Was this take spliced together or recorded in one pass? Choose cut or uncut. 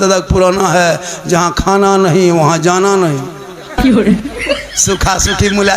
cut